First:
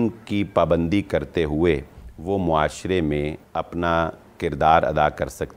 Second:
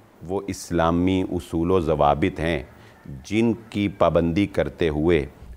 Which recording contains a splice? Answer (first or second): first